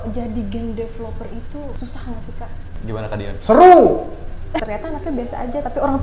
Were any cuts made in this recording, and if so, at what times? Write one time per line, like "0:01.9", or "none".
0:01.8
0:02.7
0:04.6